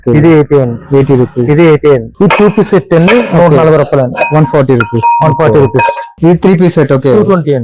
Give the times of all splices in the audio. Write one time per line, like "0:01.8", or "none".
0:02.1
0:06.1